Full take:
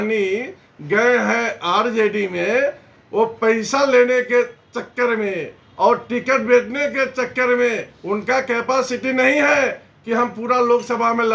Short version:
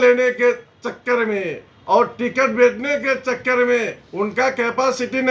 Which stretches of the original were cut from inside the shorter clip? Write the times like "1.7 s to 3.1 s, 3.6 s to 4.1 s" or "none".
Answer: none